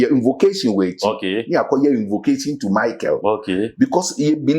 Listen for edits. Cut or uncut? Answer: uncut